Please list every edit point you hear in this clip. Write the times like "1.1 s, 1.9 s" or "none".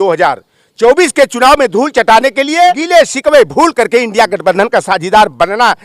2.8 s